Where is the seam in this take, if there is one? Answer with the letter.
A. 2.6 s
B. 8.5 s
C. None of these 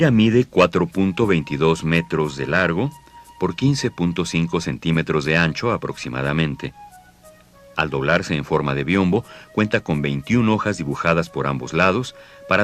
B